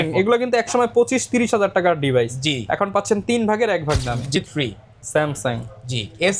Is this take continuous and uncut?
no; 1 cut; at 4.4 s

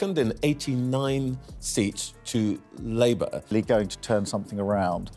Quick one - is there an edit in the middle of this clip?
yes; 1 cut; at 3.4 s

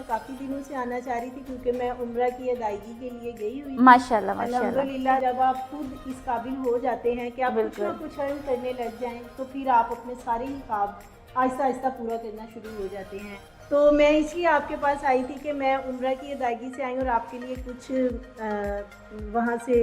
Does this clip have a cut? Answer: yes; 2 cuts; at 5.2 s, 13.5 s

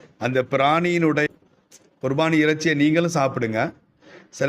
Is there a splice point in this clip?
yes; 1 cut; at 1.3 s

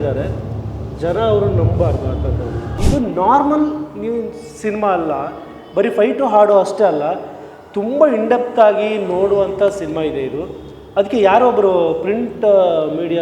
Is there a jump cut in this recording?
yes; 1 cut; at 2.8 s

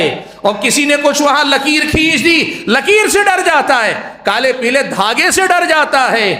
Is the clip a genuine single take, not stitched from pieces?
yes; 0 cuts

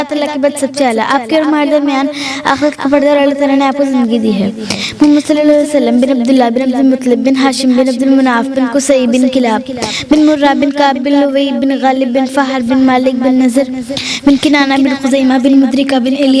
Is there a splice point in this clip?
no; 0 cuts

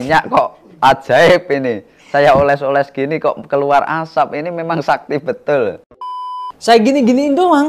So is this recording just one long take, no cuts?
no; 1 cut; at 6.1 s

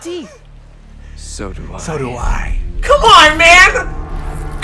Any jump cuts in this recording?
no; 0 cuts

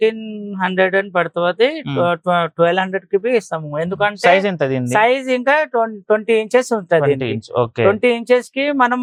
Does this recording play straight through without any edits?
yes; 0 cuts

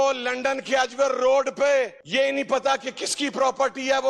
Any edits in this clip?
yes; 1 cut; at 2.0 s

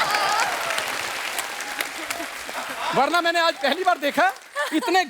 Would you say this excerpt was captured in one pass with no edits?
yes; 0 cuts

